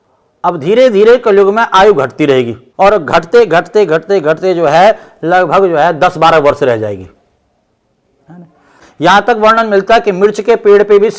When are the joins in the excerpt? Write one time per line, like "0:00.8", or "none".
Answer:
0:02.6
0:08.9